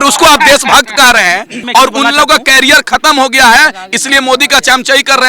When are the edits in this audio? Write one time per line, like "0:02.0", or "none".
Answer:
0:01.6